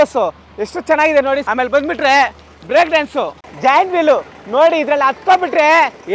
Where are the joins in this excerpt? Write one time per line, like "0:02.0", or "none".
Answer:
0:03.4